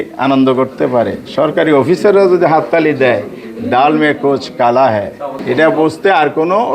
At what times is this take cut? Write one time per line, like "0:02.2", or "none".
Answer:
0:05.3